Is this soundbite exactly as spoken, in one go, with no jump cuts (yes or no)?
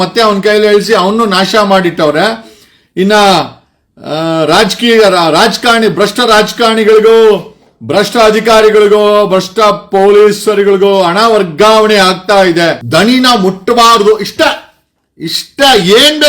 no